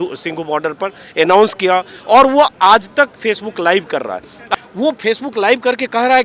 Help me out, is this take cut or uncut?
cut